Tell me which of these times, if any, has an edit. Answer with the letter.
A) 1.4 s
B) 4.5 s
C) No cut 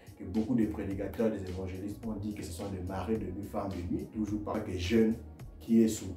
B